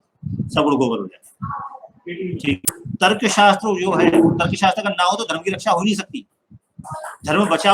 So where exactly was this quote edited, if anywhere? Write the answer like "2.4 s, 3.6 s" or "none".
2.7 s